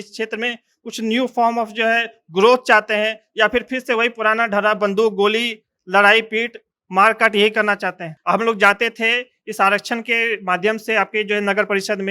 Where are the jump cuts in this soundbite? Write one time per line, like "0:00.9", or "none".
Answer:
0:08.1